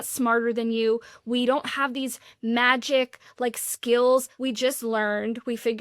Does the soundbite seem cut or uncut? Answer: cut